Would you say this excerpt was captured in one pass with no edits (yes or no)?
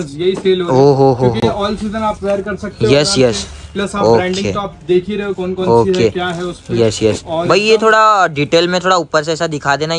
yes